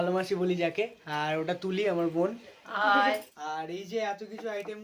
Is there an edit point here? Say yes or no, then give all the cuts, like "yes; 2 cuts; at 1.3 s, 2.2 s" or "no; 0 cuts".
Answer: yes; 1 cut; at 3.3 s